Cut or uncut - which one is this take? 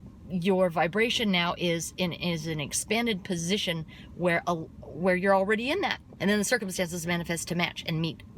cut